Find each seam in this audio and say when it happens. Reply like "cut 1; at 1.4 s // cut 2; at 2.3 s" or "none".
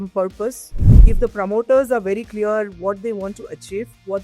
cut 1; at 1.0 s